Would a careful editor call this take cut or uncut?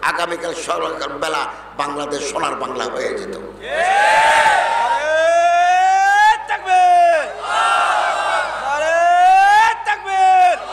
uncut